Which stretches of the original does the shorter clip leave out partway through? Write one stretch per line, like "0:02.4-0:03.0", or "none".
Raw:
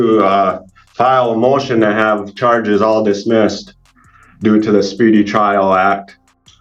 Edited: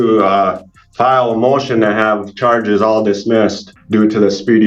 0:03.7-0:04.2